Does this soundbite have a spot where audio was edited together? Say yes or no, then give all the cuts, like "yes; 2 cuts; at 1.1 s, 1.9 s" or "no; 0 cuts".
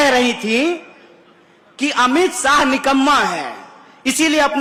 no; 0 cuts